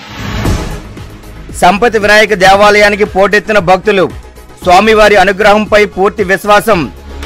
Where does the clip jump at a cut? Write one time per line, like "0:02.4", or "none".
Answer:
none